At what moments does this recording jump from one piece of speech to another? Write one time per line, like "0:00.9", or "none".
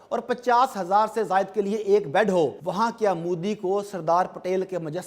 0:02.6